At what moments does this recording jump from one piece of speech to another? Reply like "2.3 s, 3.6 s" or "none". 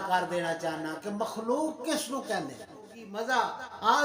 3.1 s